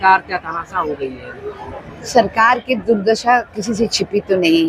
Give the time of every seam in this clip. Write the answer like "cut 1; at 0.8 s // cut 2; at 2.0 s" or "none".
none